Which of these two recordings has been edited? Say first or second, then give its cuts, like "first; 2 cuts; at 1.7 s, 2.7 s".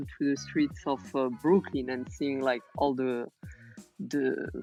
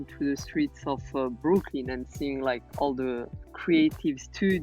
second; 1 cut; at 3.5 s